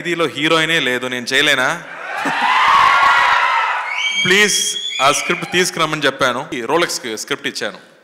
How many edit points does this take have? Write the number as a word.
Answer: one